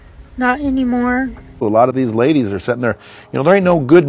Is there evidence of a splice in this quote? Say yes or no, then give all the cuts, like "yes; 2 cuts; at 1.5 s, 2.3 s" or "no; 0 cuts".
yes; 1 cut; at 1.4 s